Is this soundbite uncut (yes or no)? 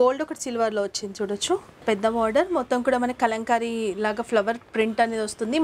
no